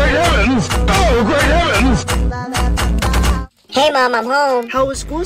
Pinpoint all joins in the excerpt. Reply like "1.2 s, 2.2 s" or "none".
3.5 s